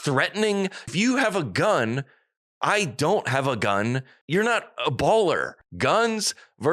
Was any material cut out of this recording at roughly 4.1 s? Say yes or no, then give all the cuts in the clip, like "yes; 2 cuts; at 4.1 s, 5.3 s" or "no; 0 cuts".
yes; 3 cuts; at 0.9 s, 4.1 s, 5.5 s